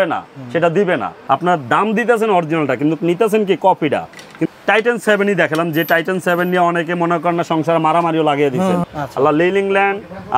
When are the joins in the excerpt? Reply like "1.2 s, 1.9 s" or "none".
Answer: 1.1 s, 4.3 s, 8.9 s